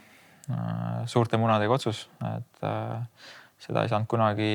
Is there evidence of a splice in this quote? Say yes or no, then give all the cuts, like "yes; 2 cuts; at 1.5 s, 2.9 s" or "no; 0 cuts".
no; 0 cuts